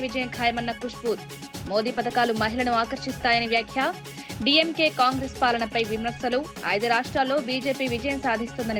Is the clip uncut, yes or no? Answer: yes